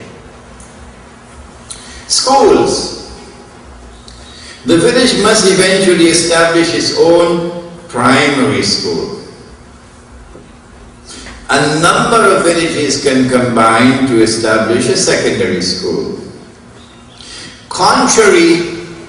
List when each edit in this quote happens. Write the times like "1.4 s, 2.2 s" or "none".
5.9 s